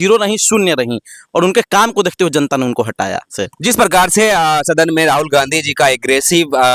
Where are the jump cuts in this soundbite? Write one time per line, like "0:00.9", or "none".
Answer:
0:03.4

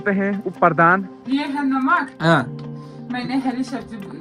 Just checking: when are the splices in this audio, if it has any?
0:01.2

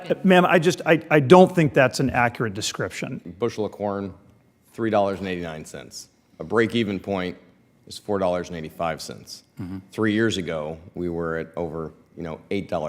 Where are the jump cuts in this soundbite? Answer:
0:03.2

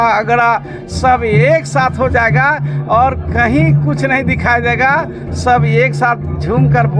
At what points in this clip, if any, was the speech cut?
none

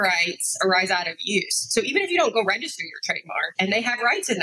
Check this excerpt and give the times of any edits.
0:03.5

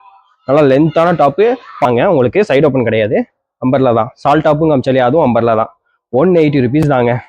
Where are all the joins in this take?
0:01.8

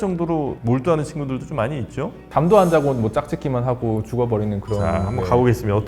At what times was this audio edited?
none

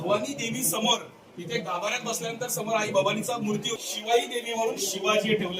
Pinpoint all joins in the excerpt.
0:03.8

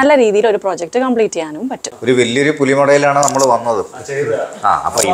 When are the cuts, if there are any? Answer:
0:01.8

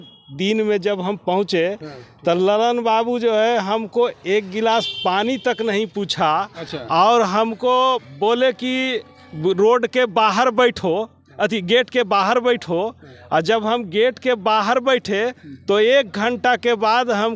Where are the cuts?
none

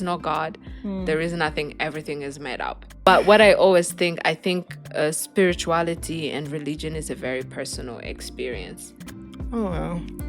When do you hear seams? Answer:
0:02.8
0:09.2

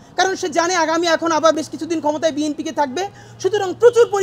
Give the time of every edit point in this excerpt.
none

